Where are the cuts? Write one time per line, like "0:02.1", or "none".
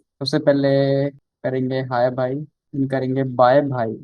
0:01.3
0:02.6